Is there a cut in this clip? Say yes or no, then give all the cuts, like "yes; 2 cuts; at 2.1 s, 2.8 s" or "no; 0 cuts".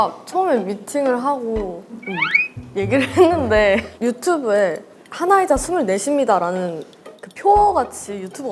yes; 1 cut; at 3.9 s